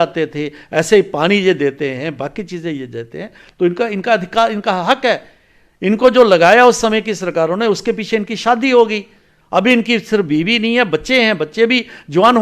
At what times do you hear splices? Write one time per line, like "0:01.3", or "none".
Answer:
none